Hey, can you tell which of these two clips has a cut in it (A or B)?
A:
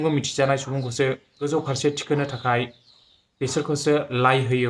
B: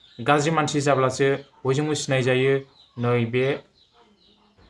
A